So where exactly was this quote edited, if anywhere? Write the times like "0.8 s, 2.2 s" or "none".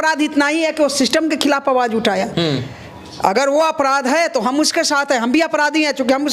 none

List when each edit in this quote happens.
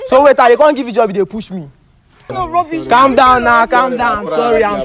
2.2 s

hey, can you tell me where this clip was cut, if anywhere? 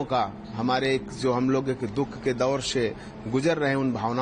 none

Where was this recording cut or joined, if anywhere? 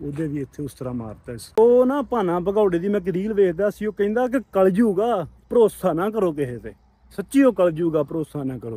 1.5 s

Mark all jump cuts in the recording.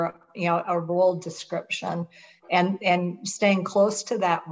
none

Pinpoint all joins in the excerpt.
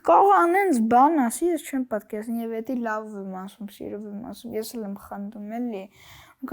none

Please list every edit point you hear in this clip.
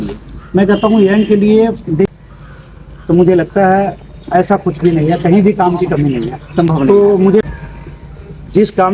2.1 s, 7.4 s

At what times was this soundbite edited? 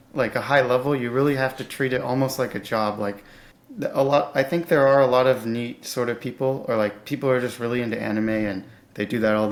none

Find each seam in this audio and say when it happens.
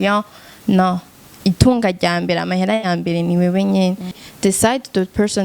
4.2 s

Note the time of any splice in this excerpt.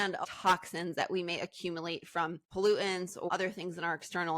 3.3 s

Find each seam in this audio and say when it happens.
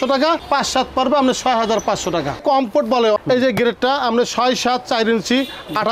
2.4 s

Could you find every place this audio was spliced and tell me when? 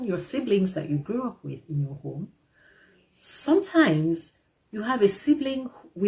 none

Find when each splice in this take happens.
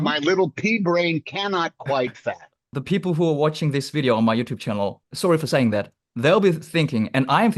2.7 s, 5.0 s

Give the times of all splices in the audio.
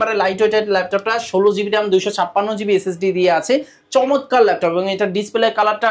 none

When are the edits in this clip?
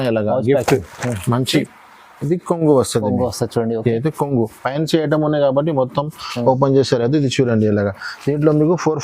1.7 s

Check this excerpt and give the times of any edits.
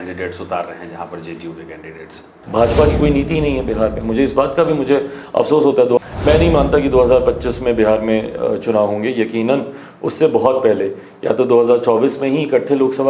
2.3 s, 6.0 s

